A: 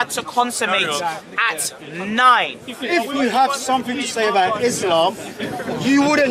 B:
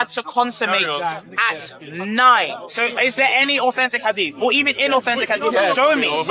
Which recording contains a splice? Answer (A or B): B